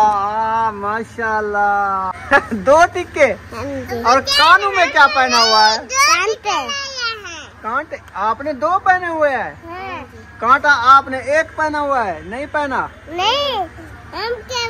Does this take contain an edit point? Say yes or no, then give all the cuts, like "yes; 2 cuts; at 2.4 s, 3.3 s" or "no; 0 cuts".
yes; 1 cut; at 2.1 s